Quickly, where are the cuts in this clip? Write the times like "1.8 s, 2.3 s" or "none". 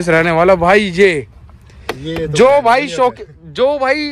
none